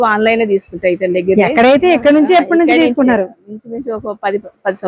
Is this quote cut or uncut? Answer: uncut